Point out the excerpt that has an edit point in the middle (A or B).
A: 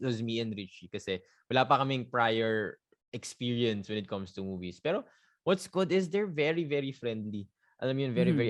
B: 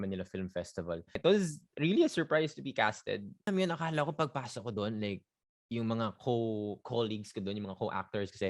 B